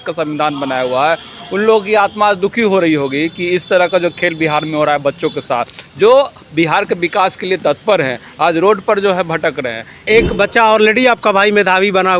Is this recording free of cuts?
no; 1 cut; at 10.0 s

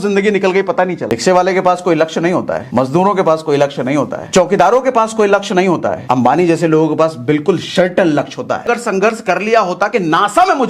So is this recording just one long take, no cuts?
no; 2 cuts; at 1.0 s, 8.6 s

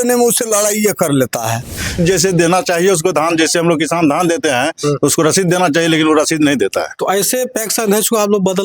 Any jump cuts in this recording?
yes; 1 cut; at 2.0 s

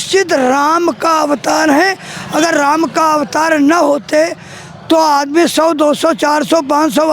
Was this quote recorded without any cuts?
yes; 0 cuts

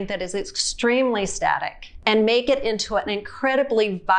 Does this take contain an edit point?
no; 0 cuts

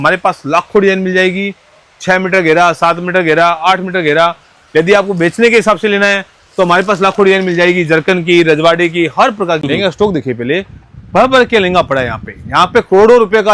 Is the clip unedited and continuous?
no; 1 cut; at 9.6 s

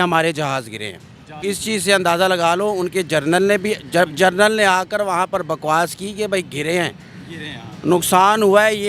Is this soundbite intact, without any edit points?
no; 1 cut; at 1.4 s

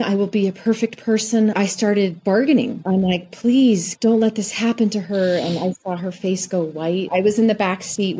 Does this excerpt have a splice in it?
yes; 1 cut; at 7.1 s

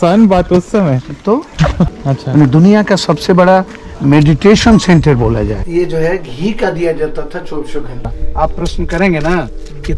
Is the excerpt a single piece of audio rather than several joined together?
no; 3 cuts; at 2.0 s, 5.6 s, 8.2 s

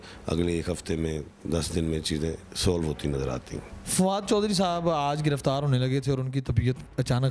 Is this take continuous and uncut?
no; 1 cut; at 3.7 s

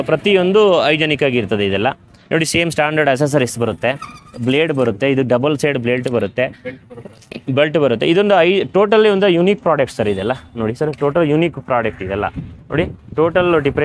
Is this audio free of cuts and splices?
yes; 0 cuts

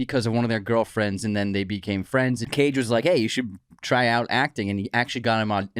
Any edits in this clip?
yes; 1 cut; at 2.5 s

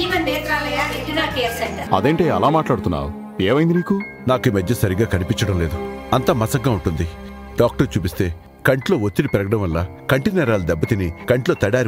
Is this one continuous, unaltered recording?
no; 1 cut; at 1.8 s

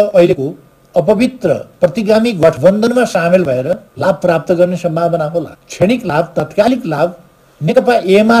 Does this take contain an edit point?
yes; 2 cuts; at 3.9 s, 5.6 s

